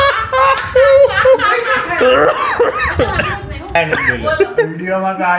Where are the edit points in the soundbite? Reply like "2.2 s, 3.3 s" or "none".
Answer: 3.8 s